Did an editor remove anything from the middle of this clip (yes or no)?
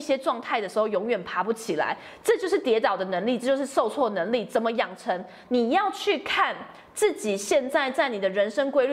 no